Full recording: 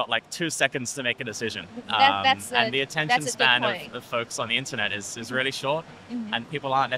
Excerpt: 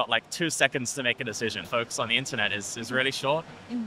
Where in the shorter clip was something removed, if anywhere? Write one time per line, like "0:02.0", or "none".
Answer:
0:01.6